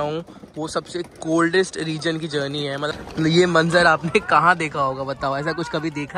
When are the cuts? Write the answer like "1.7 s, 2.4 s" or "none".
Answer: 3.0 s